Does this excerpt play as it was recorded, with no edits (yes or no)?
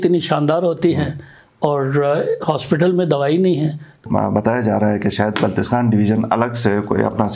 no